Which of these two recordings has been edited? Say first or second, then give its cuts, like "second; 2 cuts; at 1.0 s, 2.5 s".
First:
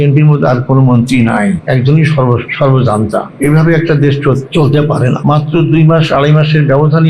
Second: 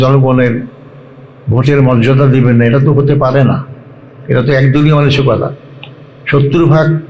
first; 5 cuts; at 1.6 s, 2.5 s, 3.3 s, 4.4 s, 5.2 s